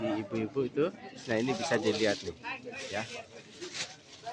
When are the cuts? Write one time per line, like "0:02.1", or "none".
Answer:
0:01.2